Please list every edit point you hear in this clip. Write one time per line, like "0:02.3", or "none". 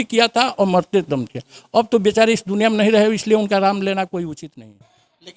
0:04.5